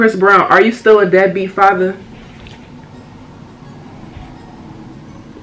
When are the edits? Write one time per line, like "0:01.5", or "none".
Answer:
none